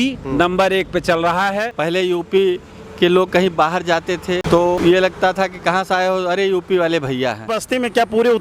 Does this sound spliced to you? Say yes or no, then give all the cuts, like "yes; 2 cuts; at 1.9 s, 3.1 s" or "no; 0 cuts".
yes; 3 cuts; at 1.7 s, 4.6 s, 7.6 s